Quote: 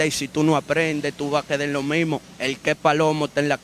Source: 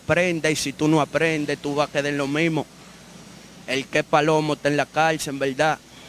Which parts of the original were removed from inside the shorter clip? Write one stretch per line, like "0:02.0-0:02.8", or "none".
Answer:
0:02.8-0:03.6